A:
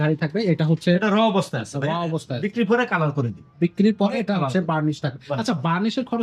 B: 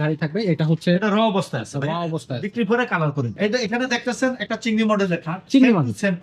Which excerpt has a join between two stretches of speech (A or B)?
B